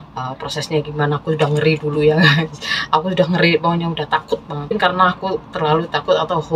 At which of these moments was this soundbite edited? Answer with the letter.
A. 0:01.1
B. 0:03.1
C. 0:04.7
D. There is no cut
C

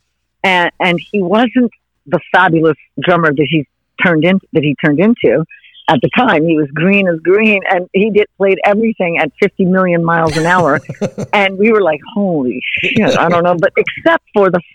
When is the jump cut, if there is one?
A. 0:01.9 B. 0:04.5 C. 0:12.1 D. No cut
A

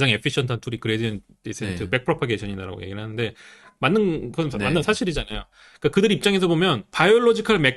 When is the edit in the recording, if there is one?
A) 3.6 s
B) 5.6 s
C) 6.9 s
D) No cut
C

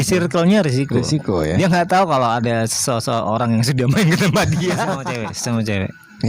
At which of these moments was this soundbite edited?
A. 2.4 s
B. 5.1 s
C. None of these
B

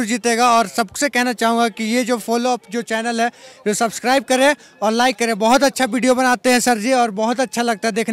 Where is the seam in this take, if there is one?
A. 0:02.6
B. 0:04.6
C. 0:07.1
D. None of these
D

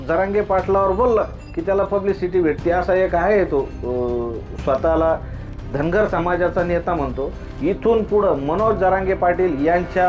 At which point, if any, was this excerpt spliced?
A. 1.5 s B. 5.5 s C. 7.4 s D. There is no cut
C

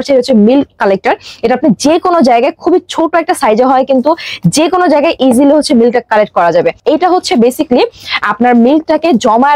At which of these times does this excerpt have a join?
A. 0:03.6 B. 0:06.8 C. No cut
B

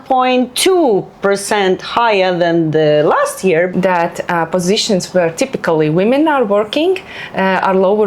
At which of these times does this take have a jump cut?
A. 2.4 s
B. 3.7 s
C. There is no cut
B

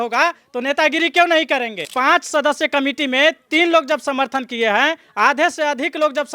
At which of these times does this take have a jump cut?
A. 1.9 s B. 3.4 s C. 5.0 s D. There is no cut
A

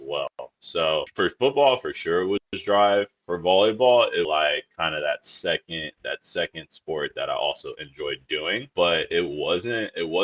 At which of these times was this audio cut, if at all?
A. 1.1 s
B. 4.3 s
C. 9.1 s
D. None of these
D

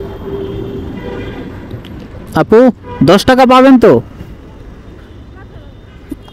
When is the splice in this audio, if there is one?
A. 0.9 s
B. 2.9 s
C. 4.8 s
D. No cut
D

